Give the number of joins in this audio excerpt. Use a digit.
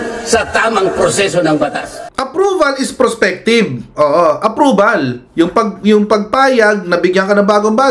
1